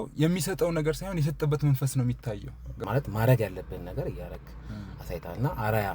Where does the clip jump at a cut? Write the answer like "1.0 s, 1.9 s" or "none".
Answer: 2.6 s